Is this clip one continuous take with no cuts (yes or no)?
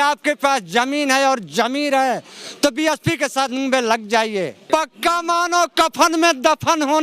no